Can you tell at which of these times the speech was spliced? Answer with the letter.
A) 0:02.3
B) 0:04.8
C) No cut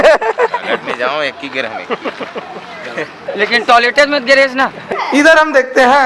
B